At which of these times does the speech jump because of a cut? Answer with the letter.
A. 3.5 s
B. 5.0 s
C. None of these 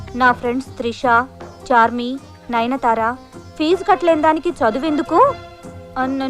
C